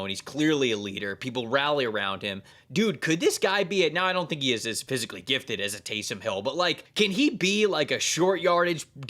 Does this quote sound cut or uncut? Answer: cut